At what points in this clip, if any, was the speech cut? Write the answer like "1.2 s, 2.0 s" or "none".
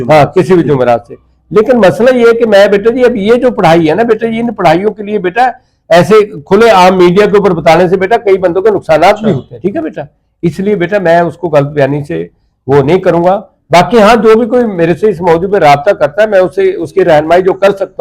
9.5 s